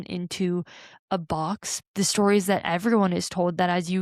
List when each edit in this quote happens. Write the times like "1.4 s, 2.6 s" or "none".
1.8 s